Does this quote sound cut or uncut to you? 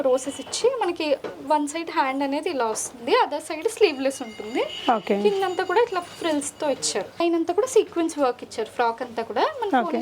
cut